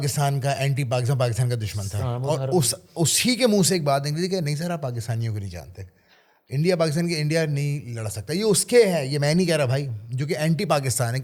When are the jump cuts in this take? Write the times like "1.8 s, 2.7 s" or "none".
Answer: none